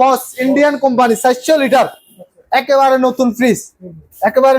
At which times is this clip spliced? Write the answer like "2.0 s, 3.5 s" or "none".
none